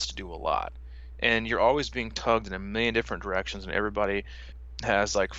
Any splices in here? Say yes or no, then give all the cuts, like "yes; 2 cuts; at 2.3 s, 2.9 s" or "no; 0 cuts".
yes; 1 cut; at 4.4 s